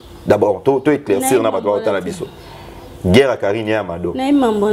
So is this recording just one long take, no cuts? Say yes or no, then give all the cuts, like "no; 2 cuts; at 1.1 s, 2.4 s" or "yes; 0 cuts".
yes; 0 cuts